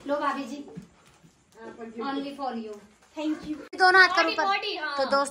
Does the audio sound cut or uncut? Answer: cut